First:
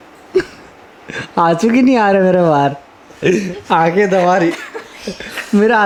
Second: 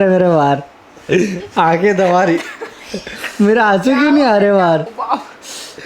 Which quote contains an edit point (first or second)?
second